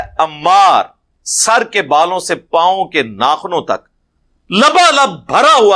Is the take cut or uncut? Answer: uncut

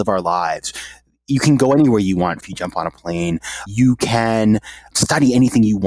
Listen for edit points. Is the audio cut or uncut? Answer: cut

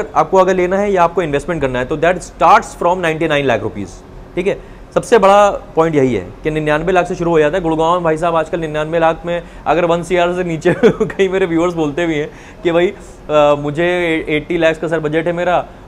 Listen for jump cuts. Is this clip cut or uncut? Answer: uncut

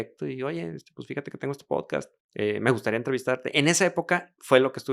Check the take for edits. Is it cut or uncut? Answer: cut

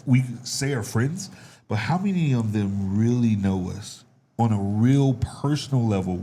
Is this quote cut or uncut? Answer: uncut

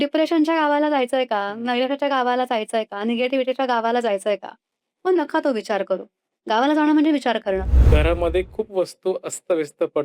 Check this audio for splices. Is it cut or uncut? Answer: cut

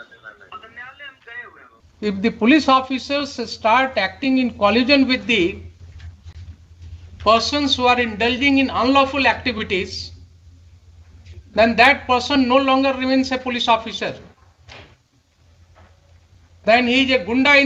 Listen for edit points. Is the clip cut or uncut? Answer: cut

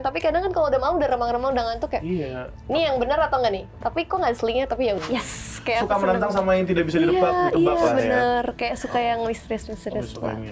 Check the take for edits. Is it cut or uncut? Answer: cut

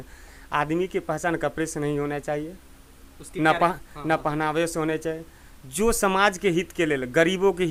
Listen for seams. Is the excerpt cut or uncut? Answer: uncut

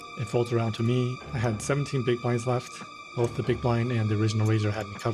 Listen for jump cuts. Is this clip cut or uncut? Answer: cut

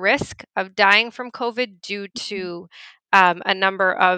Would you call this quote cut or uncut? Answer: uncut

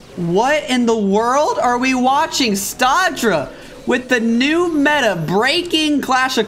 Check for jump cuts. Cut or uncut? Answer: uncut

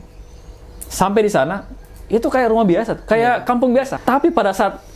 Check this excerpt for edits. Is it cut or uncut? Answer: cut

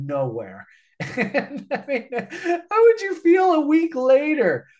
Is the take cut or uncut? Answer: uncut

